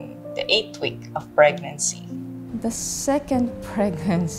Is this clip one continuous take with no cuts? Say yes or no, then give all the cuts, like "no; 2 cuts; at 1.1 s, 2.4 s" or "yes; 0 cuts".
no; 1 cut; at 2.4 s